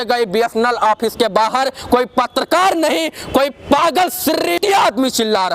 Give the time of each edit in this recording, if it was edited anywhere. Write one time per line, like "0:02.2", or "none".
0:04.6

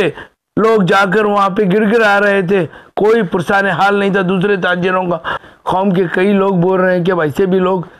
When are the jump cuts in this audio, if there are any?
0:05.4

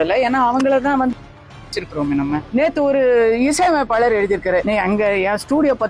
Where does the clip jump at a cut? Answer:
0:02.4
0:04.6

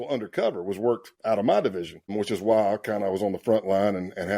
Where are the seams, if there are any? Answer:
0:01.1

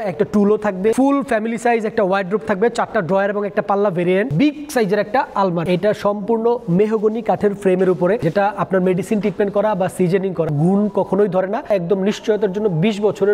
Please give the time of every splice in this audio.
0:00.9
0:04.3
0:05.6
0:08.2
0:10.5
0:11.7

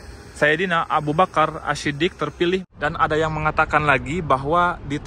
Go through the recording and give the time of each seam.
0:02.7

